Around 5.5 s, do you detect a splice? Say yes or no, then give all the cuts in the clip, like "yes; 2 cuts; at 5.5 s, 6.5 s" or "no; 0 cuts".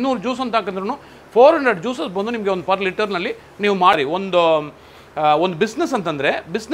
no; 1 cut; at 3.9 s